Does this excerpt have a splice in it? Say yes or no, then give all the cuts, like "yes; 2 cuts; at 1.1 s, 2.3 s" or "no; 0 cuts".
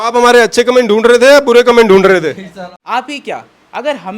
yes; 1 cut; at 2.7 s